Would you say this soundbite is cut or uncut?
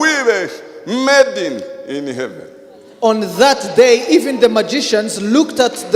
uncut